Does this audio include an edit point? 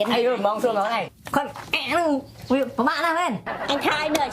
yes; 1 cut; at 1.2 s

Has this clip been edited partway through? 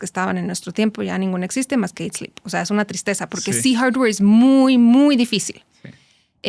no; 0 cuts

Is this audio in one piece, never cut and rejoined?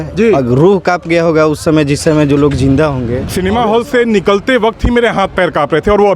no; 1 cut; at 3.3 s

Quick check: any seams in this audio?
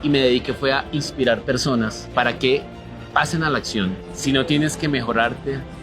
yes; 2 cuts; at 2.0 s, 4.1 s

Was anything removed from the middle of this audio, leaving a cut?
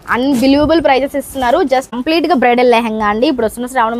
yes; 1 cut; at 2.0 s

